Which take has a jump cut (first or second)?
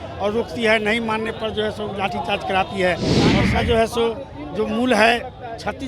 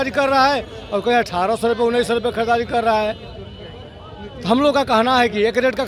first